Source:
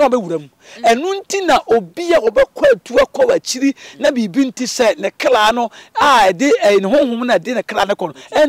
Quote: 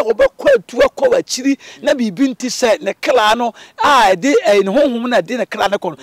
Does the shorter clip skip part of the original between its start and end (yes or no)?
no